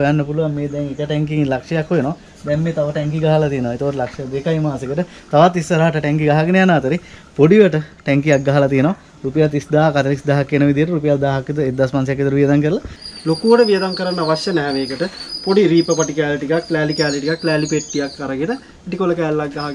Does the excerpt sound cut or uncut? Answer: cut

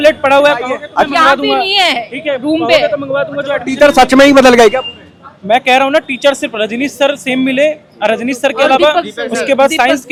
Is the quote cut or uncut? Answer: uncut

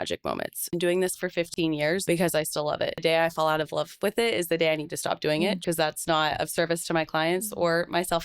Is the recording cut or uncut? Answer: cut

